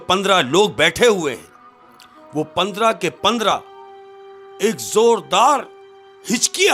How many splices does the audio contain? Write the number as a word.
zero